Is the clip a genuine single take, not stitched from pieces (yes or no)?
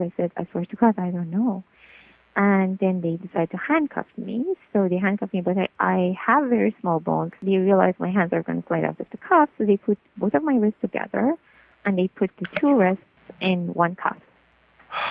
no